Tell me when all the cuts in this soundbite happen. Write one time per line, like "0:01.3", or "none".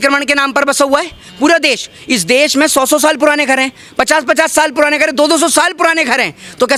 none